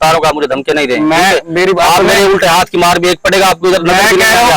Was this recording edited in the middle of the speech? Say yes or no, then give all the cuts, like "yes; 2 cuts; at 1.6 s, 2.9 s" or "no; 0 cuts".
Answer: no; 0 cuts